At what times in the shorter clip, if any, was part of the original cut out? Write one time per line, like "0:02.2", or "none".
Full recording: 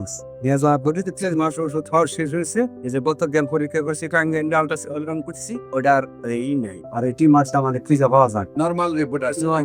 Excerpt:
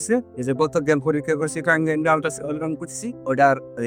none